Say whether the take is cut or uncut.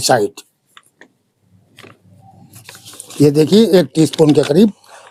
uncut